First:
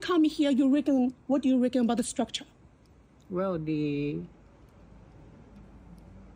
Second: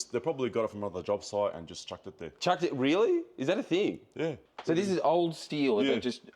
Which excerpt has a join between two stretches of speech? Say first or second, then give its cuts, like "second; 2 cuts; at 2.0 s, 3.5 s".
second; 1 cut; at 4.5 s